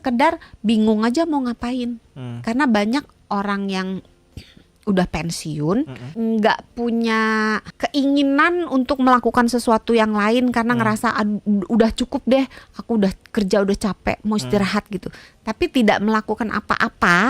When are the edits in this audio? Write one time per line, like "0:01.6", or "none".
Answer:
0:06.0
0:07.7